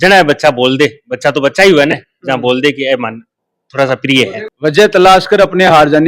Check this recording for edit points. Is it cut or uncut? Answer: cut